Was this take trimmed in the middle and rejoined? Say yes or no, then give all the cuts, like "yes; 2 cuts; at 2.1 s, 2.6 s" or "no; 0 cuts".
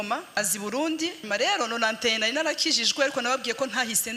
no; 0 cuts